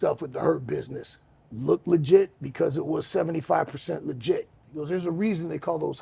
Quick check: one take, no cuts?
no; 1 cut; at 4.7 s

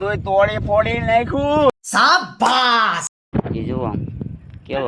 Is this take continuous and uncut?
no; 2 cuts; at 1.7 s, 3.2 s

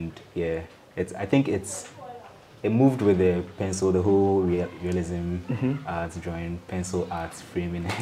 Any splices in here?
no; 0 cuts

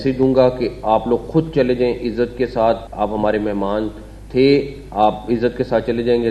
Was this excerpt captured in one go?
no; 1 cut; at 2.9 s

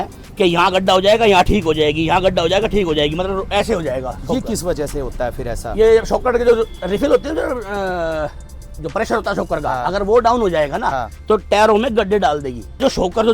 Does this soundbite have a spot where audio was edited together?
no; 0 cuts

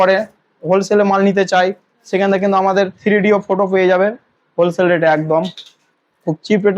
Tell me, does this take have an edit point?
no; 0 cuts

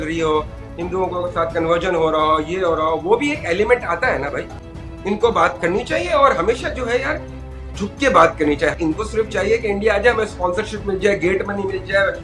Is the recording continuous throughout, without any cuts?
no; 2 cuts; at 4.6 s, 8.9 s

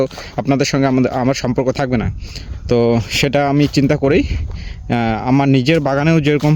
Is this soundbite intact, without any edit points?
yes; 0 cuts

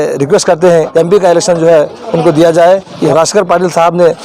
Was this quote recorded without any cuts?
no; 2 cuts; at 0.9 s, 3.1 s

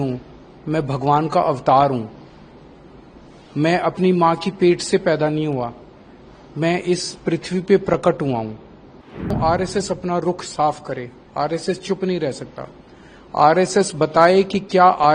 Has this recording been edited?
yes; 1 cut; at 9.3 s

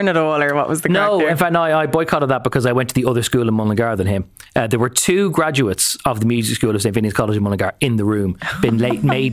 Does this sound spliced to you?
no; 0 cuts

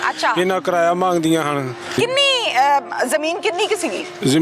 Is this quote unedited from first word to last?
no; 1 cut; at 2.0 s

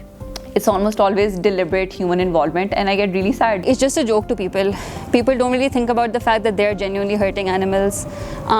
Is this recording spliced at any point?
yes; 1 cut; at 3.7 s

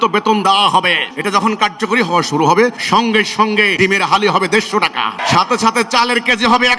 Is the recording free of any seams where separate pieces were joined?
no; 4 cuts; at 1.1 s, 2.8 s, 3.7 s, 5.2 s

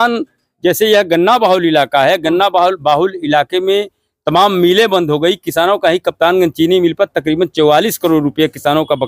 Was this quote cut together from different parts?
no; 0 cuts

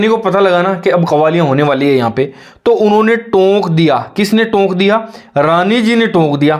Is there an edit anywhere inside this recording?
no; 0 cuts

